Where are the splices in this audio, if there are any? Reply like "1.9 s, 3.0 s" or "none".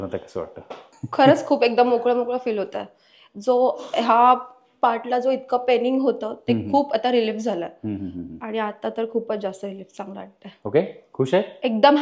0.9 s